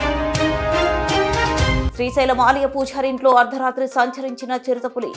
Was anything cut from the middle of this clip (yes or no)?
yes